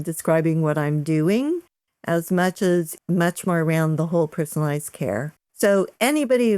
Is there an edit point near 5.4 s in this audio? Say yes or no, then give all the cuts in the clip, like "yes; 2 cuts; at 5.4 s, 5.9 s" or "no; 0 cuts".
yes; 2 cuts; at 2.9 s, 5.4 s